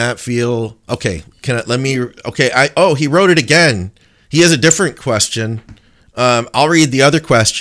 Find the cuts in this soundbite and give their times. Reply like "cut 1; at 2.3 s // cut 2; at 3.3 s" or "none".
none